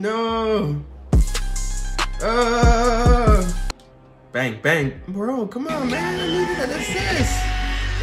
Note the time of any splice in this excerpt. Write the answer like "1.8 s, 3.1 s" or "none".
3.7 s